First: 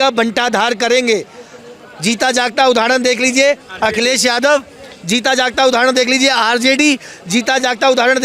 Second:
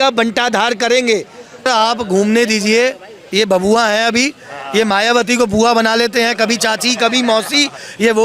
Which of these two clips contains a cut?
second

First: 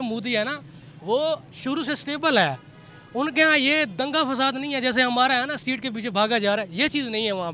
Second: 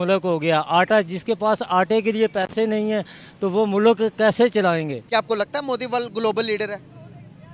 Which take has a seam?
second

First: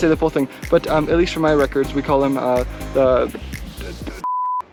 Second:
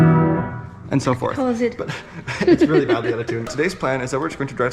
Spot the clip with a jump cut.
second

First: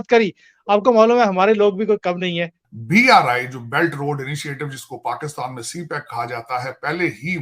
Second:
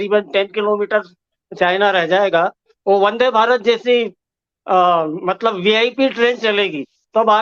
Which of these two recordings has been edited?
first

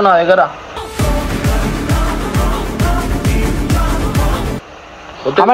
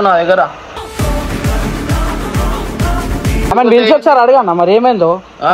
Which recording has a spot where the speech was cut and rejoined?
second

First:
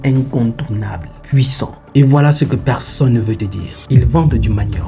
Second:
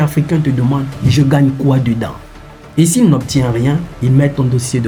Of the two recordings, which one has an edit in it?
first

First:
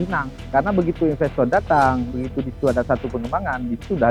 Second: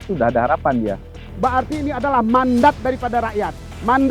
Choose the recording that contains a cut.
second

